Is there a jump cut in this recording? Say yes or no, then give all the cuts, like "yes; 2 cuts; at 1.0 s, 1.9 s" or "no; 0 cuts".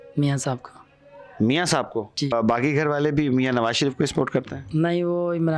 yes; 1 cut; at 2.3 s